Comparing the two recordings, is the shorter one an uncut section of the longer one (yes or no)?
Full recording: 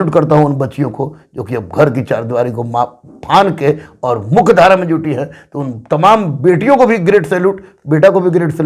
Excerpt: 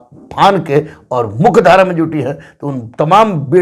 yes